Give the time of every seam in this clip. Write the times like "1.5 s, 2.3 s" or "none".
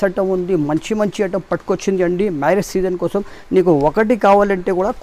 none